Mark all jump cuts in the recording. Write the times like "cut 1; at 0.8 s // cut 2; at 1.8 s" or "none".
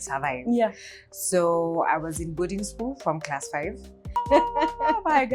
cut 1; at 4.2 s